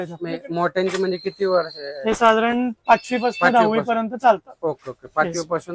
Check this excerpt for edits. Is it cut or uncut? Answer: uncut